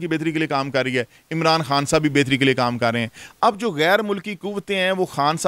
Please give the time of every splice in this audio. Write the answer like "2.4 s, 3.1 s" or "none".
none

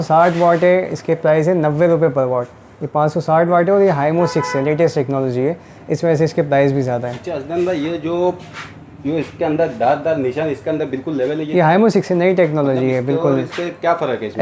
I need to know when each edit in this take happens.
none

